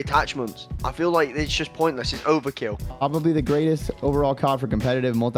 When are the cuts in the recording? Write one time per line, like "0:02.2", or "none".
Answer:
0:02.8